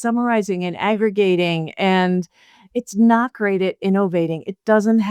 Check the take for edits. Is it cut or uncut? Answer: uncut